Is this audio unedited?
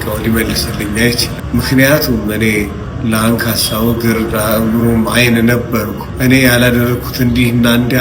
no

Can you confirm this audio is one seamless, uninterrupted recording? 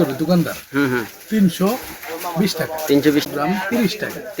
no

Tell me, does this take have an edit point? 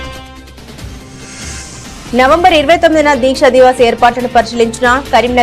no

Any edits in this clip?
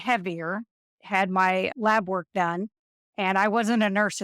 yes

